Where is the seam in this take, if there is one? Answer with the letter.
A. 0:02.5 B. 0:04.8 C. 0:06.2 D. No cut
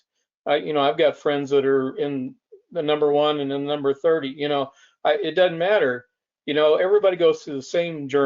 D